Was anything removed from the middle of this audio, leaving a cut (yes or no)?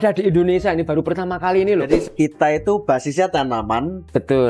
yes